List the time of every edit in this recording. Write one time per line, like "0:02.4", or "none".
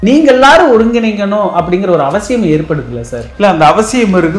none